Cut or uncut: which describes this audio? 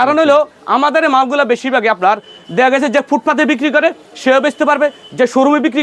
uncut